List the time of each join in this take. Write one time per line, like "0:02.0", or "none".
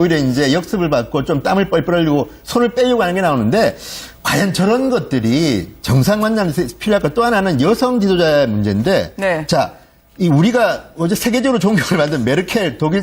none